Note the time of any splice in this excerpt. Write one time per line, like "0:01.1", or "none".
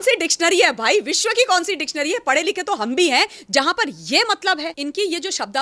0:04.7